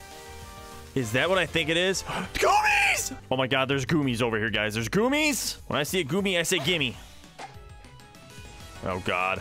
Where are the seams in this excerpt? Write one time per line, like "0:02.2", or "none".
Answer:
0:03.1
0:05.5